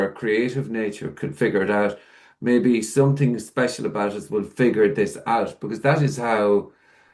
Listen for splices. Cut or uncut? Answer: uncut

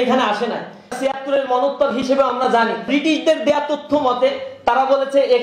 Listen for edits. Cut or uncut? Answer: cut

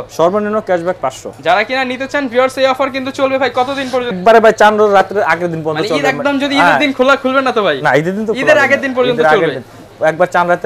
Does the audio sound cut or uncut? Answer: uncut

